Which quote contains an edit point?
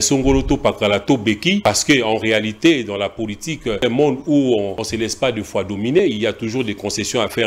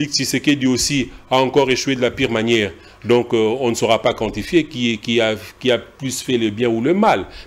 first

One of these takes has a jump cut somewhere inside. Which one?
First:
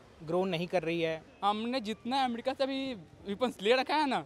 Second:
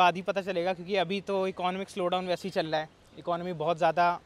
first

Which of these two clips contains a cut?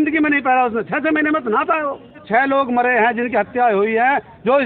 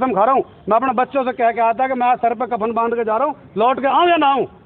first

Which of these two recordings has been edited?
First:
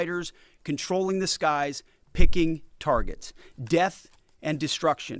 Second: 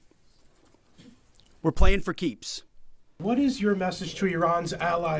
second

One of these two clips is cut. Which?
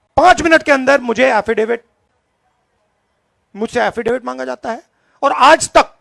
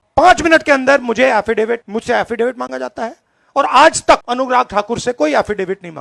second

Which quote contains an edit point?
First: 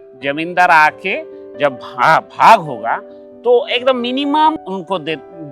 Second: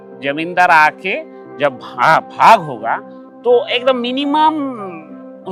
first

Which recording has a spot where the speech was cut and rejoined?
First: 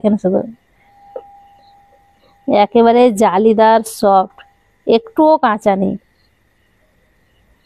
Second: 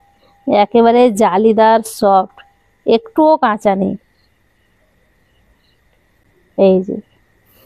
second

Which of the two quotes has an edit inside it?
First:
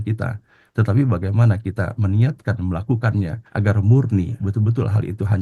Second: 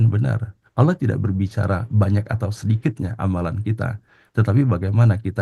first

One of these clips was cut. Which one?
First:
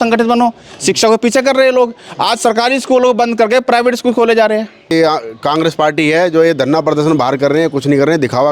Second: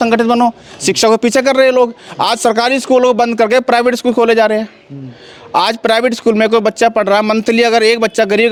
first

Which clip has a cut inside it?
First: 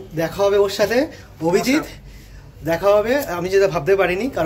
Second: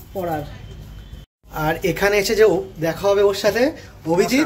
second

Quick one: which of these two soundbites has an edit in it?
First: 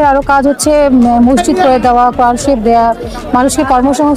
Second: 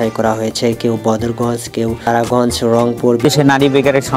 second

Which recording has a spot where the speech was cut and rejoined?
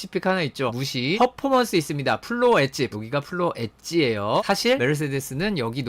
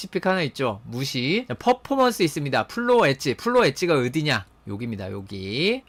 first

